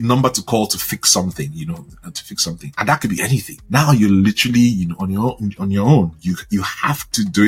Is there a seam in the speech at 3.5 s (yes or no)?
yes